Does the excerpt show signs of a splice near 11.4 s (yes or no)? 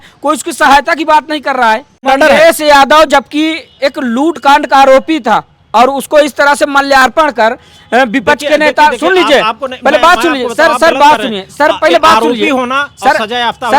no